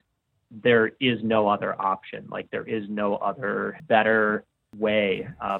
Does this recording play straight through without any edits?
no; 1 cut; at 4.6 s

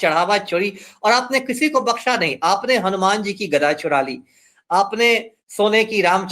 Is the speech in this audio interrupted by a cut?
no; 0 cuts

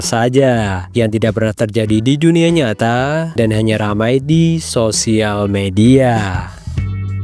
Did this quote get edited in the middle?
no; 0 cuts

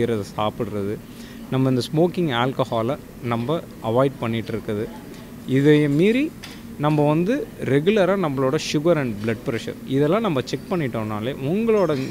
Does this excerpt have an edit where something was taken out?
no; 0 cuts

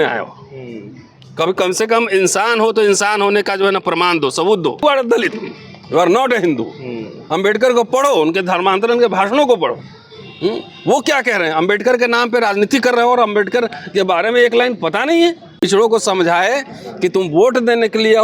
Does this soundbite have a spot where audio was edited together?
yes; 2 cuts; at 4.8 s, 15.6 s

